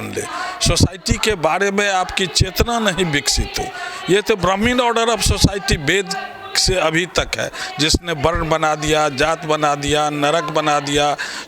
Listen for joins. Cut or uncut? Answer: uncut